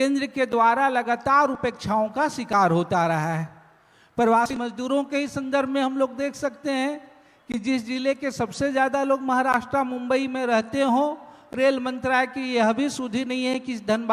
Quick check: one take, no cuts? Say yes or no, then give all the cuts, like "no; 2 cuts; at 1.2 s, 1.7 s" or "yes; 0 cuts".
yes; 0 cuts